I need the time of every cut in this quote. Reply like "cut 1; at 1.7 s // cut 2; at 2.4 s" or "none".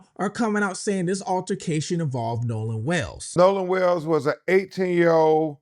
cut 1; at 3.2 s